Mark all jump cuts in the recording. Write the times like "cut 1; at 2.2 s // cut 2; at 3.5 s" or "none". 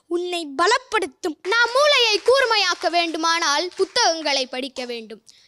cut 1; at 1.4 s